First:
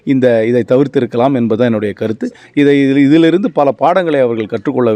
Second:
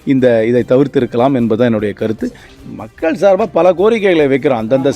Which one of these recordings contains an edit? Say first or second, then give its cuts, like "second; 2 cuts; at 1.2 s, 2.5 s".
second; 1 cut; at 2.4 s